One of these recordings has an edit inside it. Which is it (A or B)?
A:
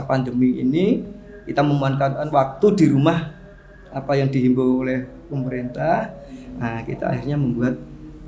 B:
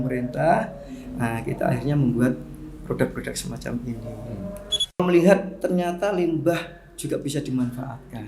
B